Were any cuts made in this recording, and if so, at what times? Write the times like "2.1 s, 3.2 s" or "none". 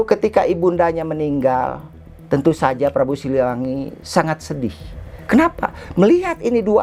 none